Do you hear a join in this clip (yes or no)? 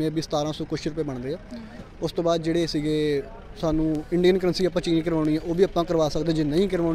no